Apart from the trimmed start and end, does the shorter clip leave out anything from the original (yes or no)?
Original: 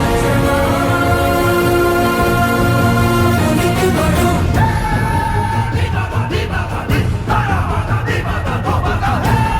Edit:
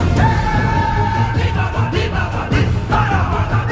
no